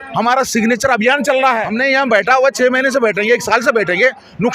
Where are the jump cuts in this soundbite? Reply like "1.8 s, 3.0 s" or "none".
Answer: 1.7 s